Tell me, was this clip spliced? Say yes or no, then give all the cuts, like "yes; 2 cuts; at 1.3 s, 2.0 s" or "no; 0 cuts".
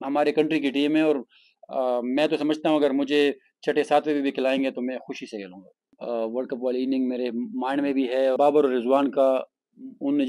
yes; 2 cuts; at 5.9 s, 8.4 s